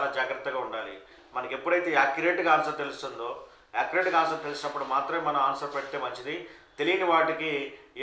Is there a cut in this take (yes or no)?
no